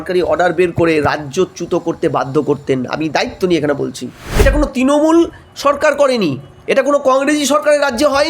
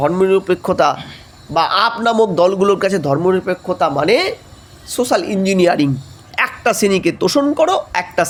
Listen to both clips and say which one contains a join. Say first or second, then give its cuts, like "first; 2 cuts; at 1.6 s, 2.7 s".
first; 1 cut; at 4.2 s